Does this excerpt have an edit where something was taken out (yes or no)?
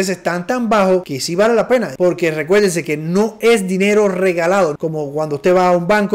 yes